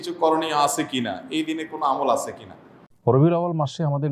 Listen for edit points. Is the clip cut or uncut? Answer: cut